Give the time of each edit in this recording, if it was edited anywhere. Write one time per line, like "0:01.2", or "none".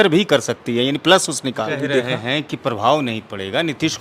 0:01.7